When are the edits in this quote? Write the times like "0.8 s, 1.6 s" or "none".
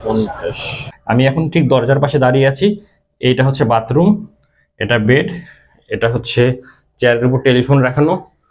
0.9 s

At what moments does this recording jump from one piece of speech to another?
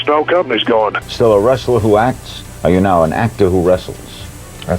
1.0 s

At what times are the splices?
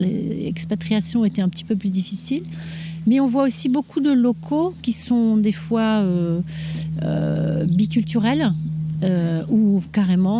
none

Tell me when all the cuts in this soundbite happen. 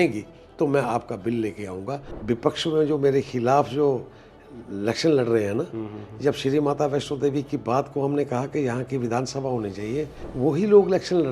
2.1 s, 10.2 s

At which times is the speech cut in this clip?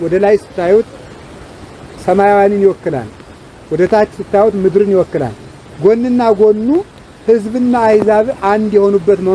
none

